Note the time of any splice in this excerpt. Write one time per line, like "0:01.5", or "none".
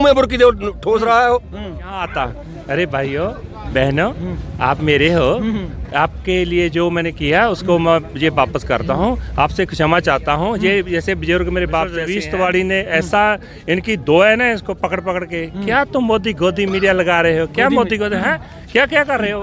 0:02.1
0:12.2